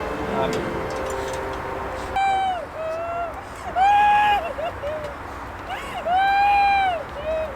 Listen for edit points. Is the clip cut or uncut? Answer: cut